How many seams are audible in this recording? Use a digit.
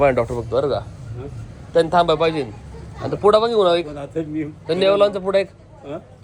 0